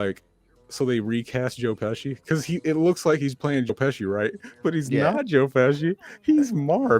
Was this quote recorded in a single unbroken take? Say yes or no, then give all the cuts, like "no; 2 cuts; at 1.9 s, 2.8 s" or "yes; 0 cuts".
no; 1 cut; at 5.2 s